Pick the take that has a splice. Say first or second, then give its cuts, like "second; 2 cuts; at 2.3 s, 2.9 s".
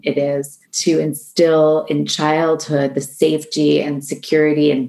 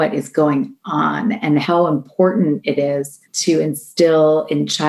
second; 1 cut; at 1.6 s